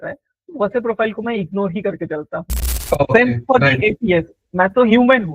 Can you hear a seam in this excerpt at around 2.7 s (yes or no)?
yes